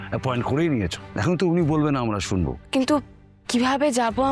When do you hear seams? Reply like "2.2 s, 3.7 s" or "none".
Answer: 1.0 s, 2.6 s

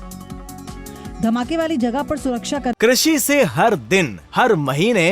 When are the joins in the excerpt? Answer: 2.7 s

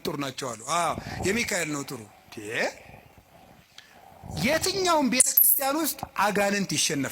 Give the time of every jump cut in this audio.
none

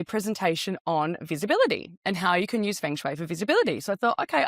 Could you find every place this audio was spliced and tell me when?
none

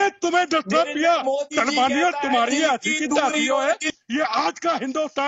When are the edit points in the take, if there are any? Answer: 3.9 s

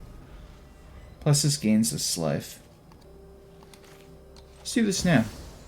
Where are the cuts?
3.1 s

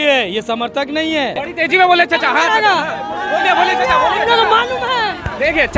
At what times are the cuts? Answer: 1.4 s

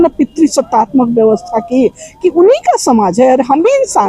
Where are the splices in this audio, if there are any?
none

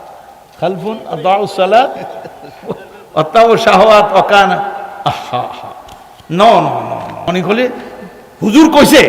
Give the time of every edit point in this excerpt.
7.3 s

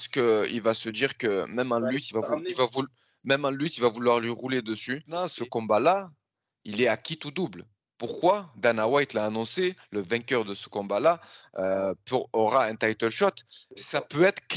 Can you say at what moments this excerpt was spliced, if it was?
5.2 s

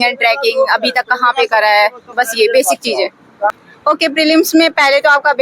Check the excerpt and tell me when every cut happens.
3.7 s

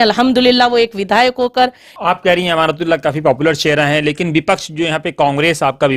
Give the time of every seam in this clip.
1.9 s

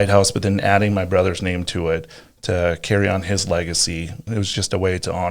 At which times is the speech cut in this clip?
4.2 s

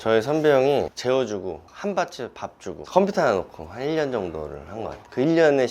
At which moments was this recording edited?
none

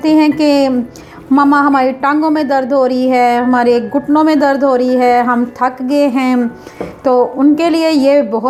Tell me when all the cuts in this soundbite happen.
none

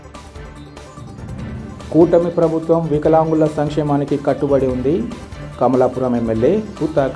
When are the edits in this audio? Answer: 1.6 s

